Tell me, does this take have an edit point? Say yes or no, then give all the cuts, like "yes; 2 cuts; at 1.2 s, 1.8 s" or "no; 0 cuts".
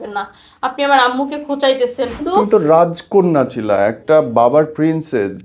yes; 1 cut; at 2.2 s